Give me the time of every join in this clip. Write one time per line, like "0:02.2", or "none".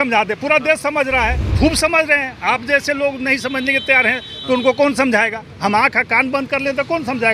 0:01.4